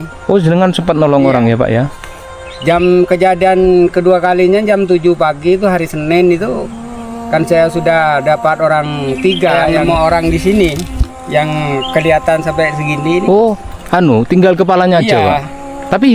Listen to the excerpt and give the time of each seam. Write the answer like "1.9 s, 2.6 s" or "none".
9.7 s